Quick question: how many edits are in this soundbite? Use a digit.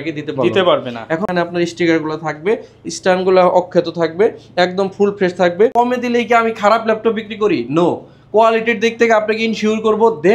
2